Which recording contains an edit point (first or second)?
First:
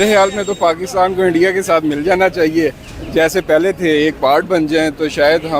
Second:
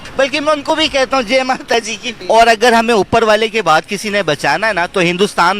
second